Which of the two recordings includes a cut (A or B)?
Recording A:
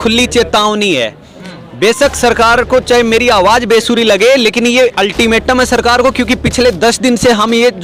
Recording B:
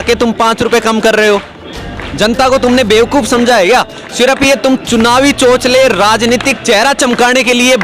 B